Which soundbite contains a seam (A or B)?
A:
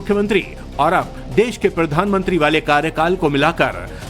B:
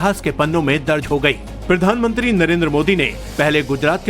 A